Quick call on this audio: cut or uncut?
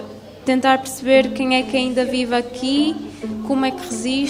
uncut